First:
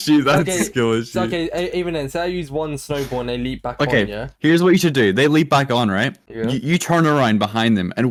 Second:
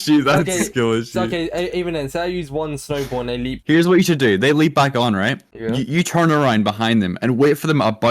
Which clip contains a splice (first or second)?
second